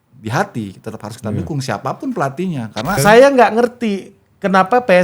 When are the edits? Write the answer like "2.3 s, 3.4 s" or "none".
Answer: 2.9 s